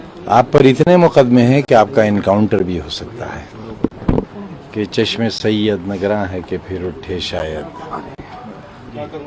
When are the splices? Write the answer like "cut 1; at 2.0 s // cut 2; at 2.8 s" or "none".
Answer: cut 1; at 4.3 s